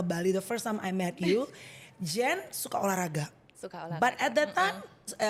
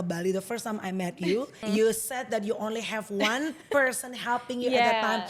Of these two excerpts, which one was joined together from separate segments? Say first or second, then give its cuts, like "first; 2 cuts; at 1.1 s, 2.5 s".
second; 1 cut; at 1.6 s